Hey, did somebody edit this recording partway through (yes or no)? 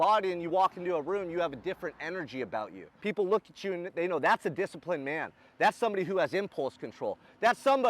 yes